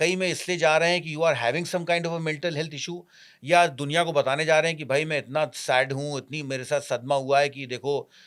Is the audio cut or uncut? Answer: uncut